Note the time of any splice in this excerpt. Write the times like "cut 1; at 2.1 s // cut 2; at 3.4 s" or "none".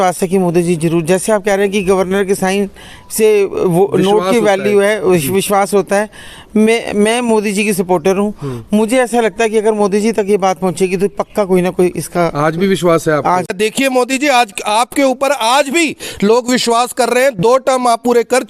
cut 1; at 13.5 s